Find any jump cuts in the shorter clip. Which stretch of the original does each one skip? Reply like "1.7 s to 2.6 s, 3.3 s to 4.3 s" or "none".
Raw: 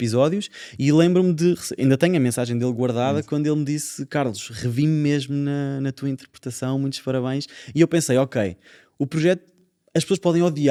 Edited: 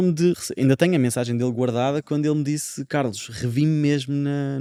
none